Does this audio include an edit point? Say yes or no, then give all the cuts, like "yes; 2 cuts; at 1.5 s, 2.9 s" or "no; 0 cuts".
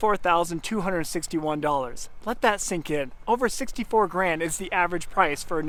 no; 0 cuts